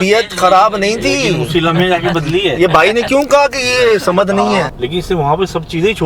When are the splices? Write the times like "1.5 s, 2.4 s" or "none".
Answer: 4.8 s